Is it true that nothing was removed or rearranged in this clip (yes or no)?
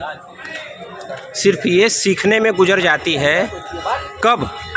yes